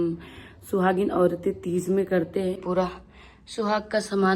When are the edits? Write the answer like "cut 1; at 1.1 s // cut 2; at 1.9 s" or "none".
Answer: cut 1; at 2.6 s

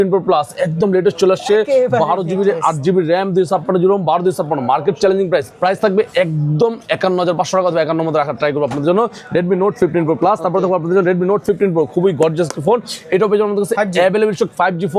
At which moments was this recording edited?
none

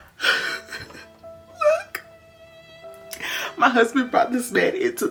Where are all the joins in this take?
none

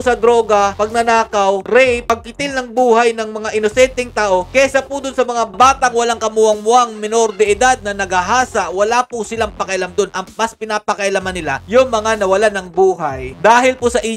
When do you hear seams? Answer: none

